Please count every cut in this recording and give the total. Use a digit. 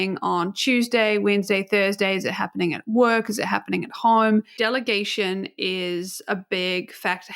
1